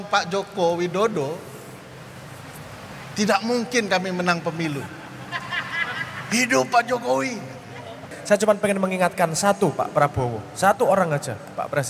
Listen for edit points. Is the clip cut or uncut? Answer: cut